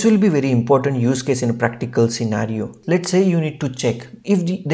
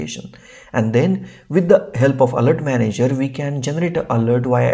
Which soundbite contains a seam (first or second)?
first